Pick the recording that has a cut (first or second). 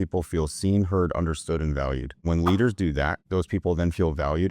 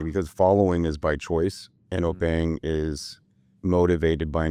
first